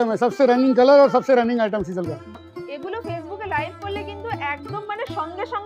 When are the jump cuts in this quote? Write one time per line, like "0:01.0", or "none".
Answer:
0:02.4